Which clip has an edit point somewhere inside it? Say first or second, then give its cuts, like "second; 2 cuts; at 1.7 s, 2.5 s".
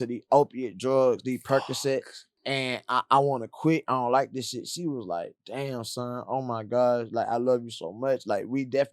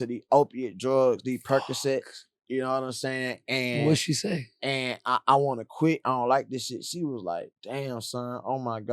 first; 1 cut; at 2.3 s